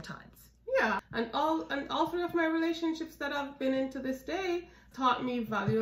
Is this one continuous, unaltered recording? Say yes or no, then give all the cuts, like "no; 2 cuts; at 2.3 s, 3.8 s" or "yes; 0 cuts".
no; 2 cuts; at 1.0 s, 4.9 s